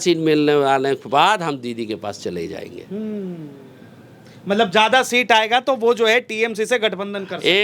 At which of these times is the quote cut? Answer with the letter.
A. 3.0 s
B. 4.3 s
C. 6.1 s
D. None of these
D